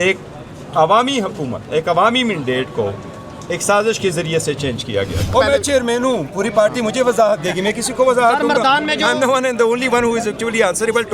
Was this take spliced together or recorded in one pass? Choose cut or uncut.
cut